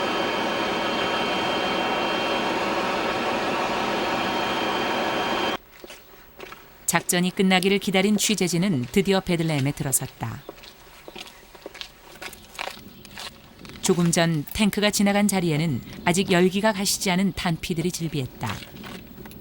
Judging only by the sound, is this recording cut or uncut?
cut